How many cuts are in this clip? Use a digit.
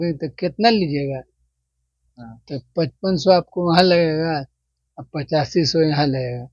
0